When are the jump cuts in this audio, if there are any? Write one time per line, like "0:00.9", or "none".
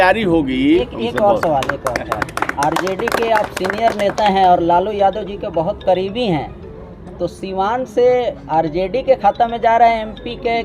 0:00.9